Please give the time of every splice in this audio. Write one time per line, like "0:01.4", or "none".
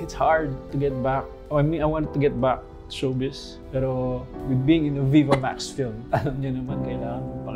0:03.6